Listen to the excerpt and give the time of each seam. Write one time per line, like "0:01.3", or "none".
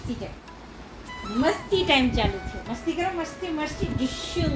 none